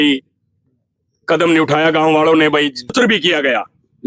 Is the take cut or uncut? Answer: cut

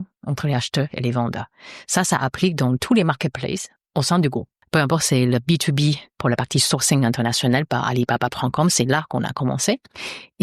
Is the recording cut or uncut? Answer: cut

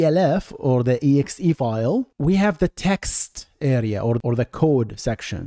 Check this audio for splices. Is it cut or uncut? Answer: cut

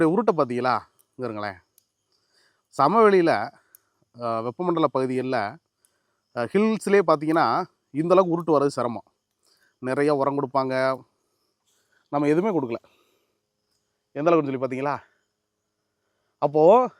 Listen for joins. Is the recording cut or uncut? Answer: uncut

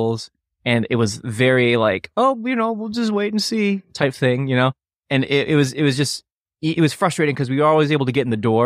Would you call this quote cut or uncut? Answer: uncut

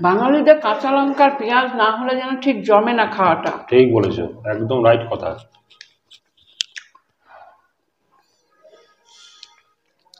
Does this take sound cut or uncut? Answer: uncut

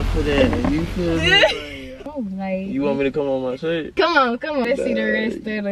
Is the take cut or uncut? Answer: cut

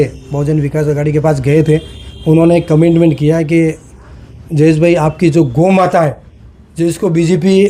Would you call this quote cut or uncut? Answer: uncut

